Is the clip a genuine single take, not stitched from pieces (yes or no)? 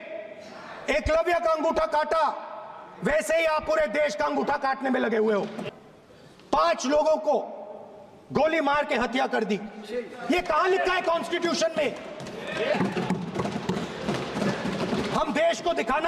no